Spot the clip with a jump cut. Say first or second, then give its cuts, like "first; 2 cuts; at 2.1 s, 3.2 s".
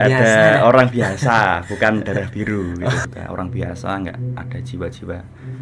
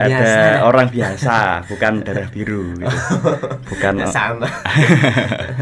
first; 1 cut; at 3.0 s